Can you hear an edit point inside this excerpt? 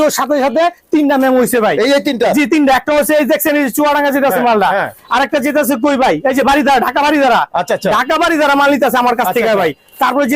no; 0 cuts

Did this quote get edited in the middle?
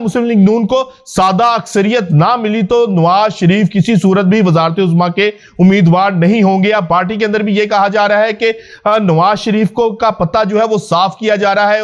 no; 0 cuts

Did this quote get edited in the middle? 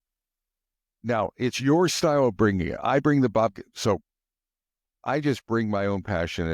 no; 0 cuts

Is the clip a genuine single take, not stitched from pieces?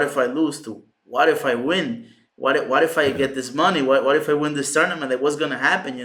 yes; 0 cuts

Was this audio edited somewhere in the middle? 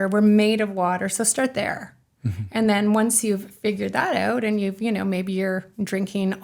no; 0 cuts

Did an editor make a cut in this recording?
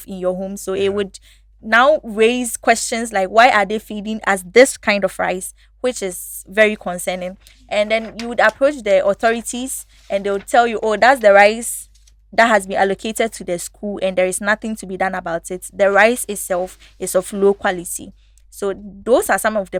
no; 0 cuts

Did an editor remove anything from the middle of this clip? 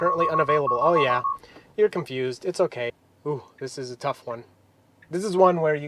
yes; 1 cut; at 3.1 s

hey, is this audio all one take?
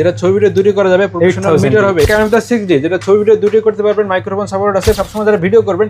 no; 2 cuts; at 2.1 s, 5.0 s

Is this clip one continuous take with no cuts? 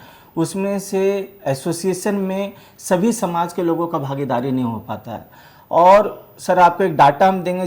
yes; 0 cuts

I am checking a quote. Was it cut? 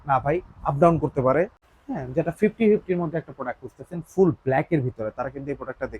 yes; 1 cut; at 1.7 s

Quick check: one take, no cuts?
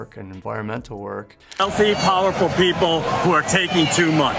no; 1 cut; at 1.4 s

